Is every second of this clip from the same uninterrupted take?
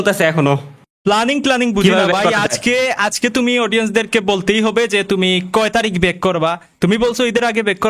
yes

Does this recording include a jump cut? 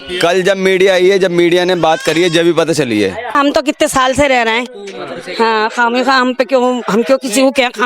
yes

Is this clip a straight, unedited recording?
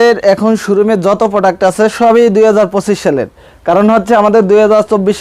yes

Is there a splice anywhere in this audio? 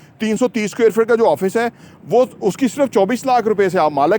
no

